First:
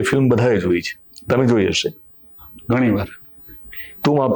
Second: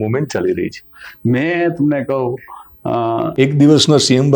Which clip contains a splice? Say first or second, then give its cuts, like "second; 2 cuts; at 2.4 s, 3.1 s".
second; 1 cut; at 3.3 s